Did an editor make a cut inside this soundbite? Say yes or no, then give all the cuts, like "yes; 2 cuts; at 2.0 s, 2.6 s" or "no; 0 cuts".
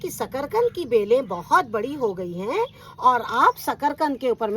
no; 0 cuts